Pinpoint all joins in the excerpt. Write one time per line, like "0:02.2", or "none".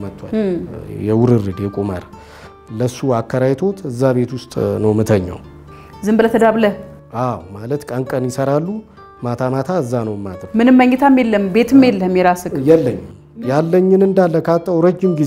none